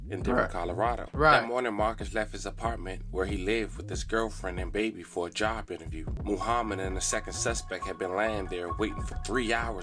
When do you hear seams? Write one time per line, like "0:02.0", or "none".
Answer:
0:01.1
0:06.1

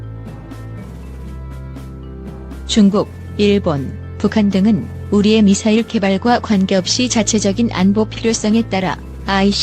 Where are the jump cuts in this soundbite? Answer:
0:02.1

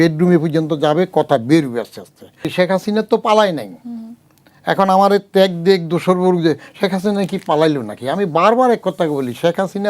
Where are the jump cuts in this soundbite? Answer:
0:02.5

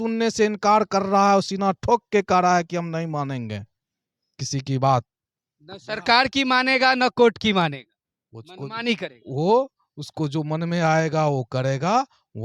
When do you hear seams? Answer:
none

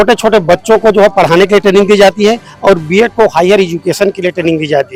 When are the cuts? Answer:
none

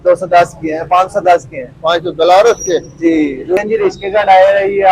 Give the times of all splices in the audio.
0:03.6

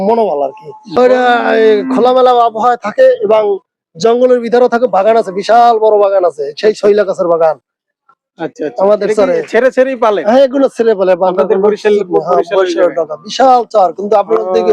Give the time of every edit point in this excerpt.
0:01.0

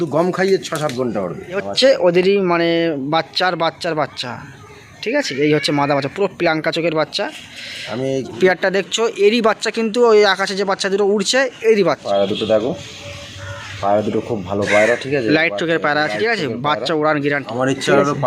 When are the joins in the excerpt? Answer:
0:01.7
0:08.4
0:12.0
0:17.5

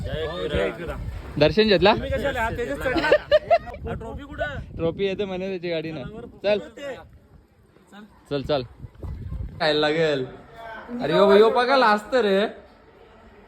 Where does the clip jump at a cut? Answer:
0:03.7
0:09.6

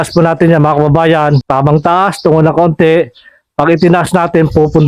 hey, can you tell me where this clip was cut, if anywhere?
0:01.4

